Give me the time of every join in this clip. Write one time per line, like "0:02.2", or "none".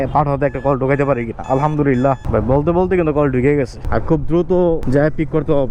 0:02.2
0:03.8
0:04.8